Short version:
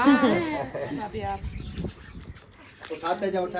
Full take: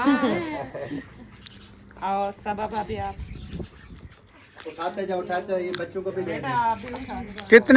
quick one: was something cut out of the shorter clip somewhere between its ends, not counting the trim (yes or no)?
yes